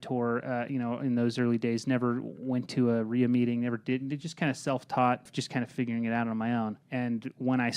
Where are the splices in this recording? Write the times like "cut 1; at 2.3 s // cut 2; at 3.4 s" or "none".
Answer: cut 1; at 5.3 s // cut 2; at 6.8 s